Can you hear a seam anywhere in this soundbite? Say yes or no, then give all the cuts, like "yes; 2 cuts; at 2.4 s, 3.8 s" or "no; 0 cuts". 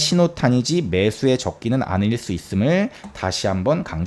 no; 0 cuts